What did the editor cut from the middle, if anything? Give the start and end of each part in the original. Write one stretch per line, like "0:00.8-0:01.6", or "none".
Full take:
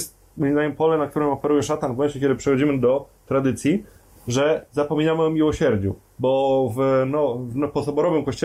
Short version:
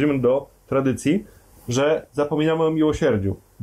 none